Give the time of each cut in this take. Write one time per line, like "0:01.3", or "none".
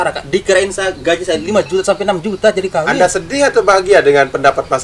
0:02.9